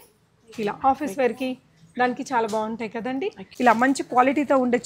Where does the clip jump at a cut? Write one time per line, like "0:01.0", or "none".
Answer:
0:03.4